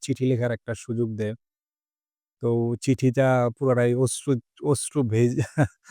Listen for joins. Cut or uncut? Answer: uncut